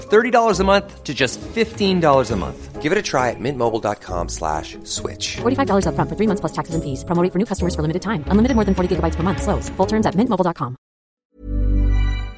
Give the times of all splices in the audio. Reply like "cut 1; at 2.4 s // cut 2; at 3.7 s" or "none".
cut 1; at 11.2 s

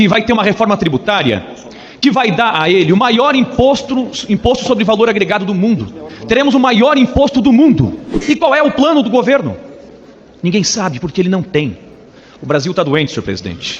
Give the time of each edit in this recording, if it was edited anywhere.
cut 1; at 8.1 s

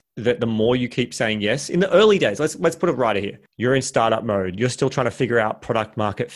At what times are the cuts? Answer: cut 1; at 3.4 s

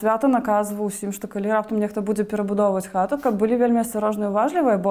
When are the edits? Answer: none

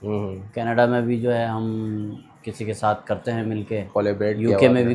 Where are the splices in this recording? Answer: none

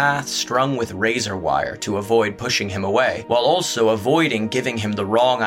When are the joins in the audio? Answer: cut 1; at 3.2 s

